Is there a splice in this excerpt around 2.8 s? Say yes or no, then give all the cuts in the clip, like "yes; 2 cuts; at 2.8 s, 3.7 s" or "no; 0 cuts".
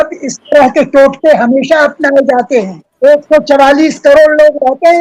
yes; 1 cut; at 2.8 s